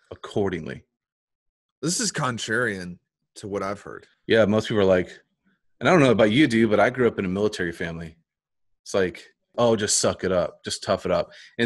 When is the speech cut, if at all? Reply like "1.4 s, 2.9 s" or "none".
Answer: 4.1 s, 9.5 s